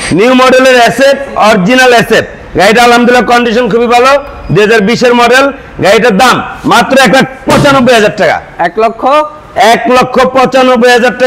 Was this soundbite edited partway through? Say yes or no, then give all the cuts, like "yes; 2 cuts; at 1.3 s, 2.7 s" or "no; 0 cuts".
no; 0 cuts